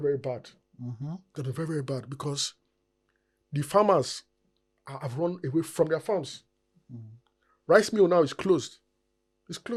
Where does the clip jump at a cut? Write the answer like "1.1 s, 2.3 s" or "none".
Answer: none